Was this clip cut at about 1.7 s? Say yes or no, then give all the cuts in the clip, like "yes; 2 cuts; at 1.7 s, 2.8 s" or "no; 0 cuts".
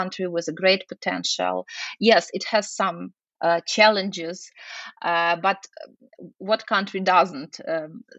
no; 1 cut; at 3.2 s